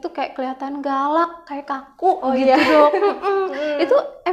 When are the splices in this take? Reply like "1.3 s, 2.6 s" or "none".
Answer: none